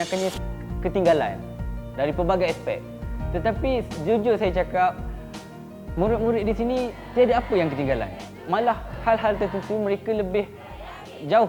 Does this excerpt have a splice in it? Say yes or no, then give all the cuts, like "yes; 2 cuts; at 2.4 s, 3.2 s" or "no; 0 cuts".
yes; 1 cut; at 8.6 s